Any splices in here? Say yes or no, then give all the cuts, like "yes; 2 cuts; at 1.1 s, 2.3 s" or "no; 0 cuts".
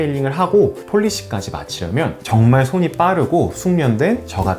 yes; 2 cuts; at 0.8 s, 2.2 s